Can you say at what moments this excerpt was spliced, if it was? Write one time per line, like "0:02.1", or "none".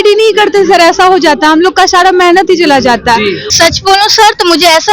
0:03.4